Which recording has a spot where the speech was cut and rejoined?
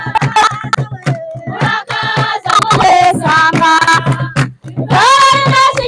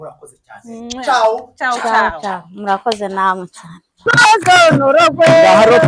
second; 1 cut; at 4.1 s

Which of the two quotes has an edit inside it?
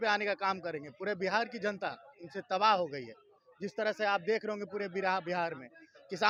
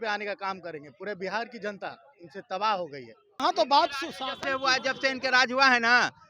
second; 1 cut; at 3.4 s

